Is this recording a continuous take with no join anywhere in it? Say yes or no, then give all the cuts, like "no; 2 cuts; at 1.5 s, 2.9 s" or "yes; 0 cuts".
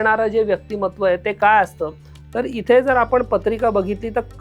yes; 0 cuts